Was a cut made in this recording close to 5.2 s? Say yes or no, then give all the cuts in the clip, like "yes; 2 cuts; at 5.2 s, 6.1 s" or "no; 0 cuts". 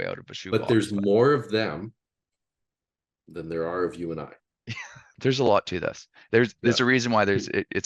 yes; 1 cut; at 5.2 s